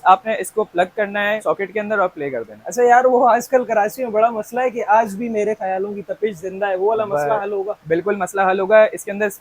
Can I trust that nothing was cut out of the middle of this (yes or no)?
yes